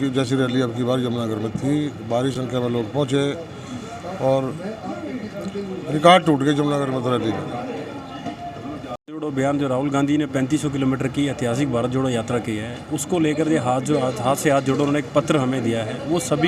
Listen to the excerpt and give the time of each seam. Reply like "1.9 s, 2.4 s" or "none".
none